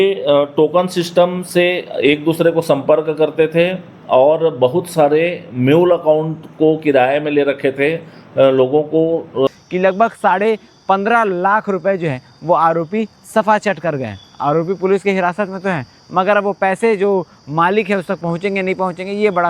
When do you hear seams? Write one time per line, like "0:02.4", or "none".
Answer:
0:09.5